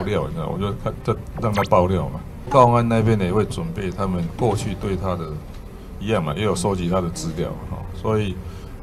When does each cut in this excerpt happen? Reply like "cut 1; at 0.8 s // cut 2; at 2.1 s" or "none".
cut 1; at 2.5 s